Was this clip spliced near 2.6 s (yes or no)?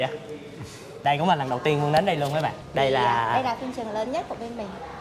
yes